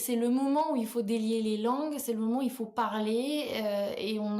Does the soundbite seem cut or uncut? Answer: uncut